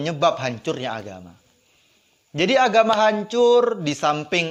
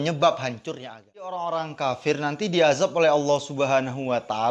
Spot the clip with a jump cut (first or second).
second